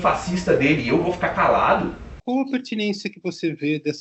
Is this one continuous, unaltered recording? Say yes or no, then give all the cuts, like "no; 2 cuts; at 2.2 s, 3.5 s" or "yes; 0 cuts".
no; 1 cut; at 2.1 s